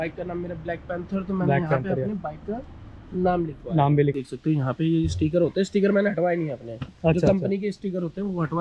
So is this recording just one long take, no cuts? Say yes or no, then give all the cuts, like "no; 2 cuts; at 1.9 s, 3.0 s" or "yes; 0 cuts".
no; 1 cut; at 4.2 s